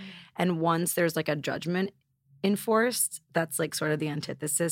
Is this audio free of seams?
no; 1 cut; at 3.1 s

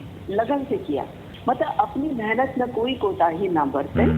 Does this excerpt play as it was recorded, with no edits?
no; 1 cut; at 1.3 s

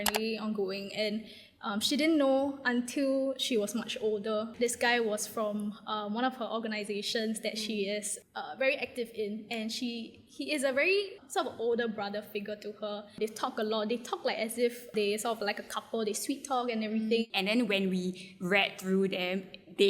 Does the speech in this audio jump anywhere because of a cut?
yes; 5 cuts; at 4.5 s, 11.2 s, 13.1 s, 14.9 s, 17.2 s

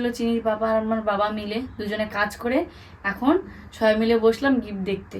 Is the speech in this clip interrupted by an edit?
no; 0 cuts

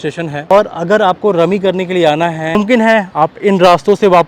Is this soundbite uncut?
no; 1 cut; at 2.6 s

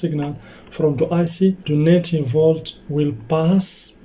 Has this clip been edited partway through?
yes; 1 cut; at 1.6 s

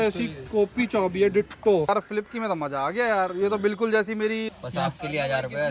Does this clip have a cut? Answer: yes; 2 cuts; at 1.9 s, 4.6 s

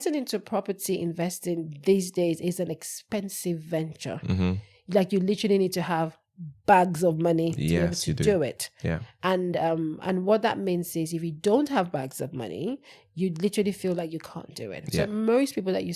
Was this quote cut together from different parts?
no; 0 cuts

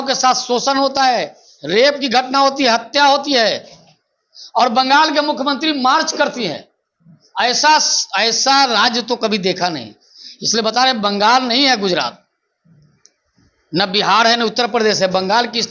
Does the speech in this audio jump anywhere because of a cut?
no; 0 cuts

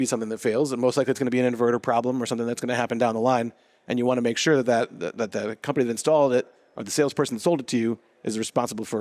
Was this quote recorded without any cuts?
yes; 0 cuts

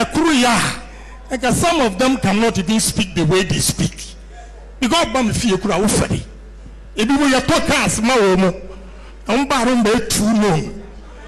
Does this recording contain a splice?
no; 0 cuts

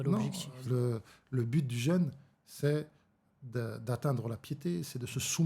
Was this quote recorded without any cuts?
yes; 0 cuts

